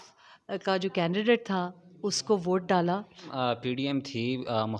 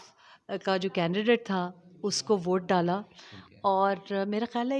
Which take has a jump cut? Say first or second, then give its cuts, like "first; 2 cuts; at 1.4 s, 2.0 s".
first; 1 cut; at 3.2 s